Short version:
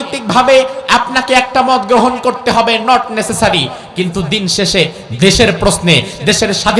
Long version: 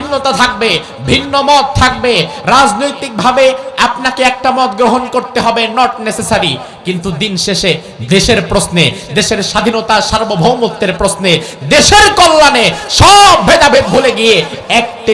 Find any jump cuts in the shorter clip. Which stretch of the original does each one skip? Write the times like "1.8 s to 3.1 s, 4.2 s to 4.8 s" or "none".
none